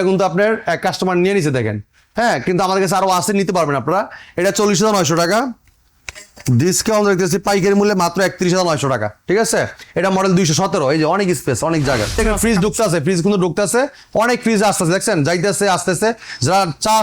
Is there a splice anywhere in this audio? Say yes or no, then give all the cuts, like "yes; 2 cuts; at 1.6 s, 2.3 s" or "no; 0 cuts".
yes; 1 cut; at 12.2 s